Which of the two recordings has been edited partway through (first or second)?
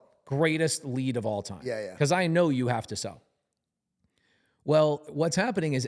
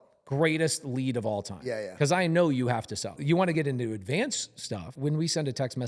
second